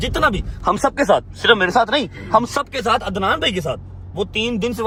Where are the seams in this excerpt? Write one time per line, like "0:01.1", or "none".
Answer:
none